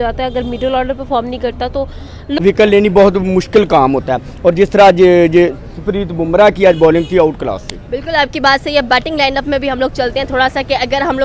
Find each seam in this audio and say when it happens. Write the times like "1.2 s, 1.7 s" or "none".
2.3 s